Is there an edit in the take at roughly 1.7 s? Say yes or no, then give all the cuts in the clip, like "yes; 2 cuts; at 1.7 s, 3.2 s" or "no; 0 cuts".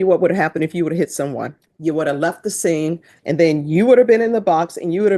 yes; 2 cuts; at 1.7 s, 3.1 s